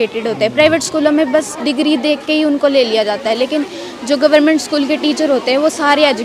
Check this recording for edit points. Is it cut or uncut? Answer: uncut